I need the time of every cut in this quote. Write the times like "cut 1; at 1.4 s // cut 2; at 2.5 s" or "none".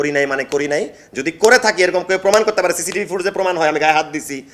none